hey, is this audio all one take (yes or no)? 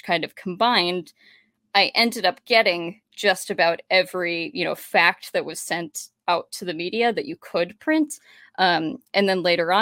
yes